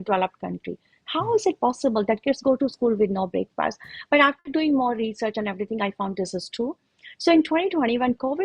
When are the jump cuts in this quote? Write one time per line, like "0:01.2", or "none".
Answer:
none